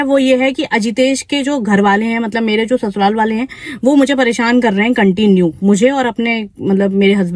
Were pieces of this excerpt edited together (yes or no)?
no